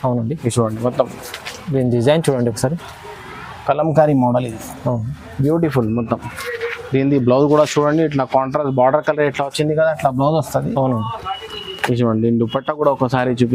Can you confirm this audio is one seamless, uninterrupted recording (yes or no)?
yes